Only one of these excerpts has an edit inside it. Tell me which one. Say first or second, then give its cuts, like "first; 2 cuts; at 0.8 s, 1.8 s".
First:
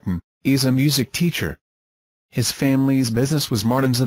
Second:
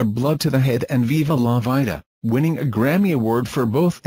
second; 1 cut; at 2.0 s